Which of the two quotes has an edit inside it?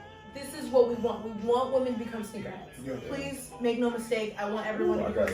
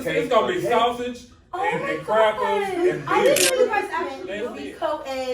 second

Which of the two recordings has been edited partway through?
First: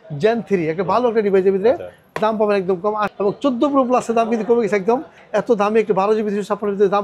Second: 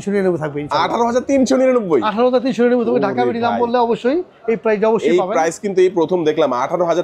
first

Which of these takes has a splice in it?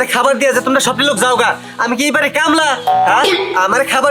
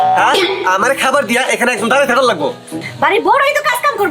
second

